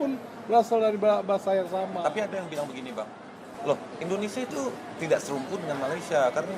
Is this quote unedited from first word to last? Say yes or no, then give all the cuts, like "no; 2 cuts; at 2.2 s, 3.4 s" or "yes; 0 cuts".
no; 1 cut; at 3.4 s